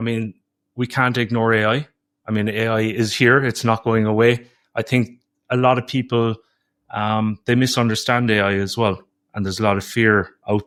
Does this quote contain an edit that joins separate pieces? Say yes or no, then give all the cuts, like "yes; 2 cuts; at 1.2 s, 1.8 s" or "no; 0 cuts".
no; 0 cuts